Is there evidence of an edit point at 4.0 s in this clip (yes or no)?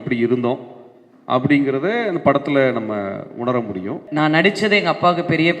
yes